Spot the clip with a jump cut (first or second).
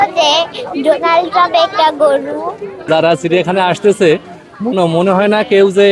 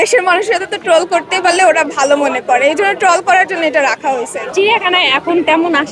first